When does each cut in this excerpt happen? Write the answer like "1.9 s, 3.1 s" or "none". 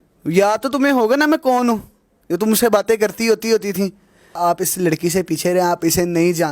4.4 s